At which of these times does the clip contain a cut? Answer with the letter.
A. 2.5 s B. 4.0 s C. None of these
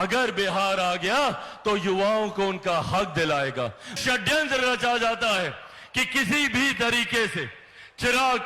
B